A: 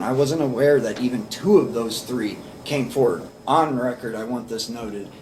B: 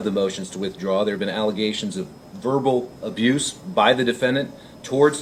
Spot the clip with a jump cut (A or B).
A